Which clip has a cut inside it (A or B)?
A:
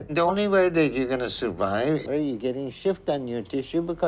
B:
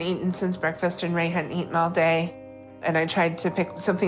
A